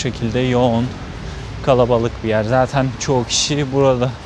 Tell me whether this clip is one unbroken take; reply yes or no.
yes